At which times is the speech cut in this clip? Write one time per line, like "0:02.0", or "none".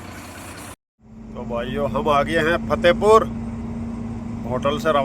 0:01.3